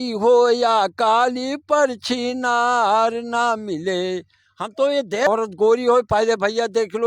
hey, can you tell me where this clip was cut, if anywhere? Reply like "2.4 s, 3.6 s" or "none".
5.3 s